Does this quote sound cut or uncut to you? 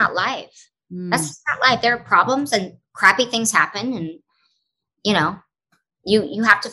uncut